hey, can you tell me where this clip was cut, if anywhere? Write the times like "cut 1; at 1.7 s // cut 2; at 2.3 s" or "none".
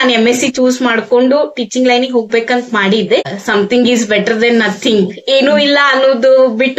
cut 1; at 3.3 s